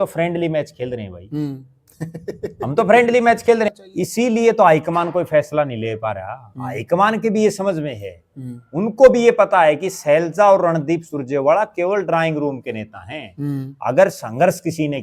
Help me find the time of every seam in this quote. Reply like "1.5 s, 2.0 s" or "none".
3.7 s